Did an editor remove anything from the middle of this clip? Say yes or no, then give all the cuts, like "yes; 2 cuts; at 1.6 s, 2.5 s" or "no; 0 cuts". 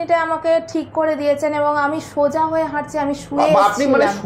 no; 0 cuts